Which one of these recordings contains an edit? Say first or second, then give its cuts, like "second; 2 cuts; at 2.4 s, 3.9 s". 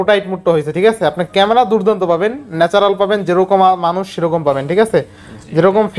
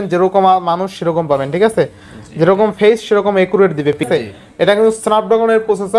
second; 1 cut; at 4.1 s